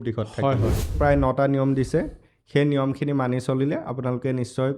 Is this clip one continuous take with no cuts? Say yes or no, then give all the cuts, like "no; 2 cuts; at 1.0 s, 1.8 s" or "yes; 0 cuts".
no; 1 cut; at 0.9 s